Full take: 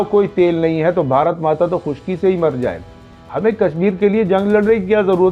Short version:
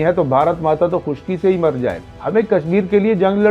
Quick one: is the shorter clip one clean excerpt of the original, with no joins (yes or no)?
no